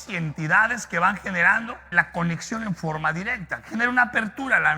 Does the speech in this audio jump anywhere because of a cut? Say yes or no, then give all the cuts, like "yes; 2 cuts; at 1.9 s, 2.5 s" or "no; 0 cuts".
yes; 1 cut; at 1.8 s